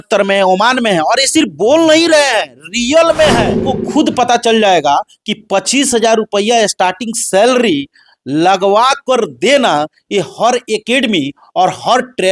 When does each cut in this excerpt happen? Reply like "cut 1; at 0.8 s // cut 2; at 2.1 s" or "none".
cut 1; at 3.5 s